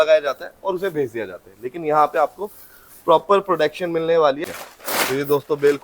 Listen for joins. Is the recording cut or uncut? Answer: cut